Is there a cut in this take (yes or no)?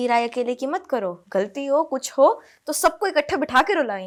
no